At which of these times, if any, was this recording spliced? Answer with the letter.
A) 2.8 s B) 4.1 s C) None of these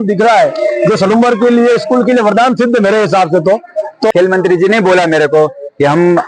B